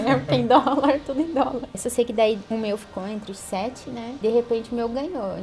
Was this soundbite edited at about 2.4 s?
yes; 3 cuts; at 1.8 s, 2.4 s, 4.2 s

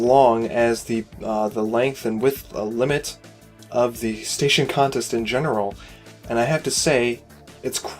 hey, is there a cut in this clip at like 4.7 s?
yes; 1 cut; at 4.7 s

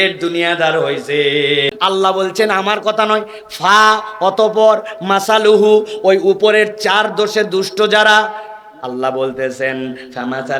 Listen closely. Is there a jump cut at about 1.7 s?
yes; 1 cut; at 1.7 s

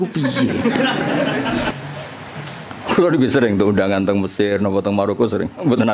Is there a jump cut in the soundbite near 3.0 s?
no; 1 cut; at 1.7 s

